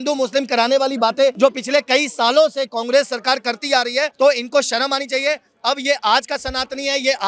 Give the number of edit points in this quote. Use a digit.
2